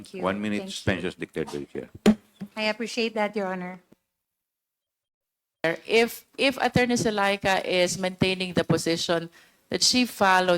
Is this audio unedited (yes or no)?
no